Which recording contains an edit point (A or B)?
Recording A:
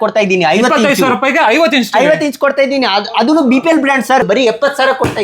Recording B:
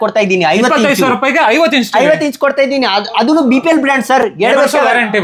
A